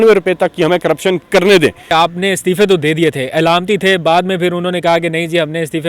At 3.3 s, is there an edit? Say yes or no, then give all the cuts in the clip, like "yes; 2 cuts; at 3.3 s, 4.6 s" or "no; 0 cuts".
no; 1 cut; at 1.9 s